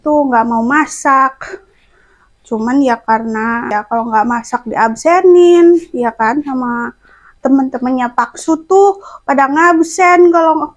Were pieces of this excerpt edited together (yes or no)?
yes